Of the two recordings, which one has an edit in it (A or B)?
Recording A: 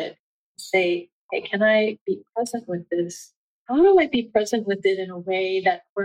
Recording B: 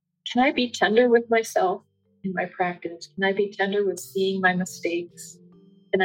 A